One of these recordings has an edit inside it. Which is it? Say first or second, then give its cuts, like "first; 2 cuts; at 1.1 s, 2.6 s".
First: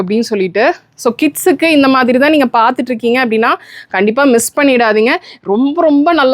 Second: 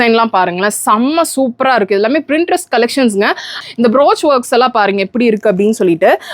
second; 1 cut; at 3.6 s